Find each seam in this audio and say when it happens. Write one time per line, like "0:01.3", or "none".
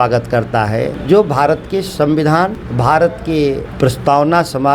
0:01.0
0:02.6
0:03.7